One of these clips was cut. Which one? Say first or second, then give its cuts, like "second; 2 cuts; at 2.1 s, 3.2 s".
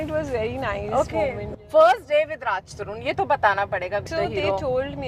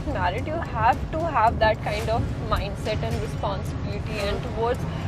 first; 2 cuts; at 1.5 s, 4.1 s